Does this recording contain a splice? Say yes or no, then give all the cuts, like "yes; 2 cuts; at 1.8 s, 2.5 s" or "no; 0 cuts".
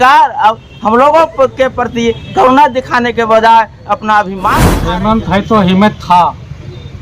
yes; 1 cut; at 4.6 s